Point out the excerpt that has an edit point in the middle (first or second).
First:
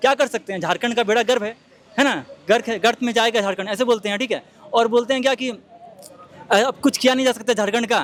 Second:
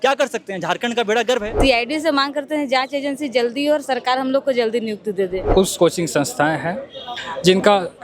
second